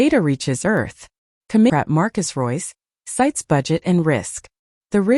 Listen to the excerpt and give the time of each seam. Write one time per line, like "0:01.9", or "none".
0:01.7